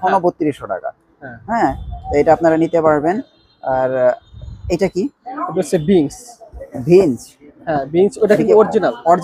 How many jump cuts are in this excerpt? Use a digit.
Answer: 0